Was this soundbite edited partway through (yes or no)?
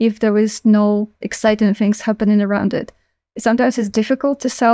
yes